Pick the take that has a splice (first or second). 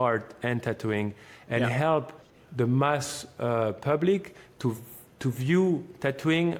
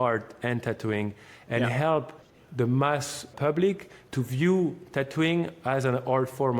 second